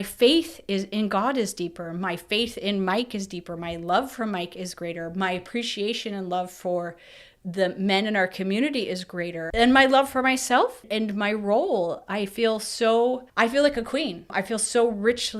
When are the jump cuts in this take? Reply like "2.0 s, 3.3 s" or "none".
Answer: 9.4 s, 10.9 s, 13.3 s, 14.3 s